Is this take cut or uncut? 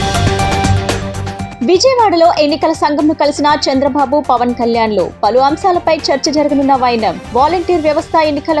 uncut